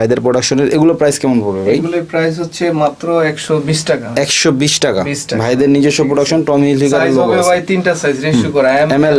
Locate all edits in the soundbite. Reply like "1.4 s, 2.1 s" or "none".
none